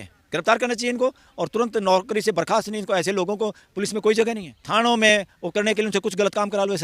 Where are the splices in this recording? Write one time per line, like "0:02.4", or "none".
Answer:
0:04.5